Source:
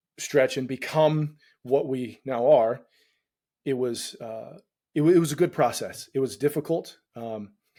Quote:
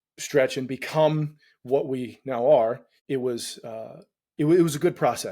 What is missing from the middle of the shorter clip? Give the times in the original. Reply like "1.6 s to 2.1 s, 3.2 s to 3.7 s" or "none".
2.9 s to 3.5 s